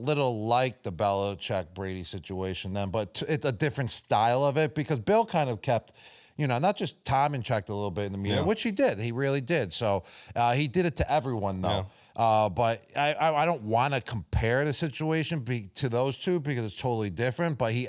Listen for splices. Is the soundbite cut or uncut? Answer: uncut